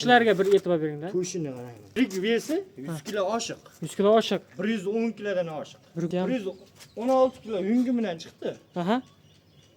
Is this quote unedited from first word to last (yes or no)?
no